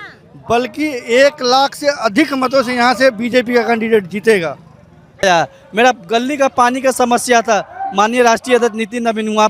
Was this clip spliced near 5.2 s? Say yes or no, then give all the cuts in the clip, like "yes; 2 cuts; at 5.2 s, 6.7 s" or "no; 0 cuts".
yes; 1 cut; at 5.2 s